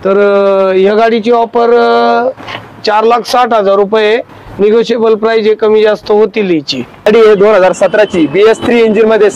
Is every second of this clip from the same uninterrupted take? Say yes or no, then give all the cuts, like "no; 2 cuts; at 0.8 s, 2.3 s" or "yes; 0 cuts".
no; 1 cut; at 7.1 s